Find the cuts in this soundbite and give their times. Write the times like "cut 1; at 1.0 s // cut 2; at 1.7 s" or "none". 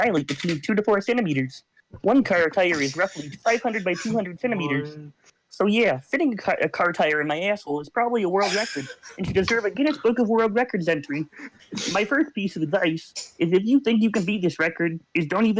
none